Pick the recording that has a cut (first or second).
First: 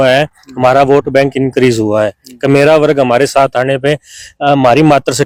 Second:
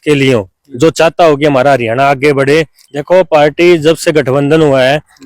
second